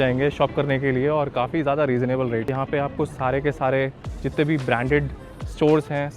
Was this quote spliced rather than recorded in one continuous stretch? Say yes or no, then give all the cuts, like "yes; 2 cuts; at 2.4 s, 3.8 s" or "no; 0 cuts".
yes; 1 cut; at 2.5 s